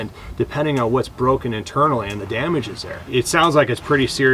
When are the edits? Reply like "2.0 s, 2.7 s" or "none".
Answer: 3.0 s